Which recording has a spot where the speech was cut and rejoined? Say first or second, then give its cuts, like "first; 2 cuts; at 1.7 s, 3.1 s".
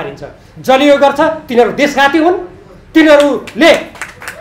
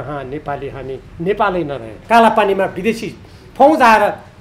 second; 1 cut; at 1.9 s